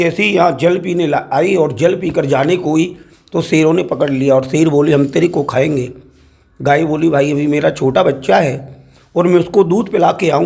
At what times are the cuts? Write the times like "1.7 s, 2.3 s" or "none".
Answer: none